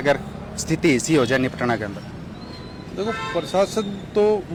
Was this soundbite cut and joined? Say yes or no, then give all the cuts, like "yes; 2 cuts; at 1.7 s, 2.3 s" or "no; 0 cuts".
no; 0 cuts